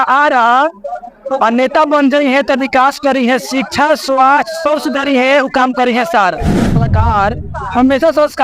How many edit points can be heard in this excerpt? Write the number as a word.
one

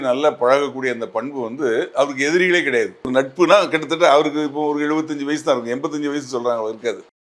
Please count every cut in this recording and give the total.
one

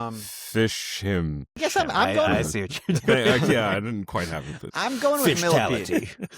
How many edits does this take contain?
one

